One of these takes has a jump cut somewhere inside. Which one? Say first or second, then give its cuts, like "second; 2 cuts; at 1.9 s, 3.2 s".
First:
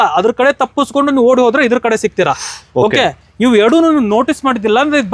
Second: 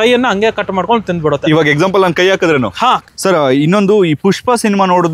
second; 1 cut; at 3.0 s